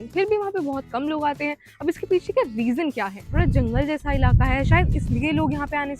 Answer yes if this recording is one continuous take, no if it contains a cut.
no